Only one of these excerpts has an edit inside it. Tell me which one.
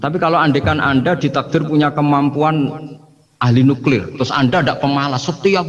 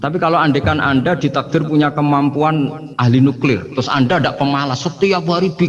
second; 1 cut; at 2.9 s

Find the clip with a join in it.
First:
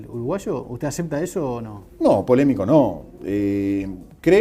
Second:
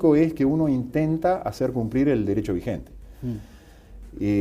first; 1 cut; at 1.6 s

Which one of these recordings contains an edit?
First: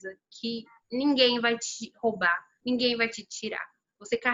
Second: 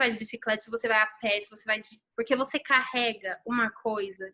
second; 1 cut; at 2.0 s

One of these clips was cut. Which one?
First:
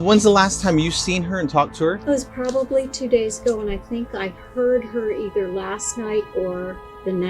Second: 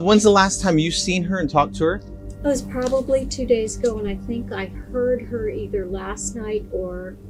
first; 1 cut; at 2.0 s

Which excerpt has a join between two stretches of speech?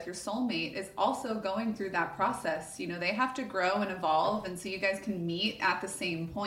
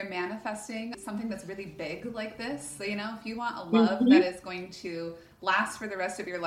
second; 1 cut; at 1.0 s

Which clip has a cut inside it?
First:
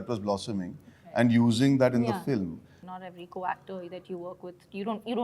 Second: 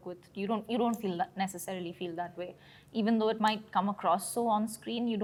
first; 1 cut; at 2.7 s

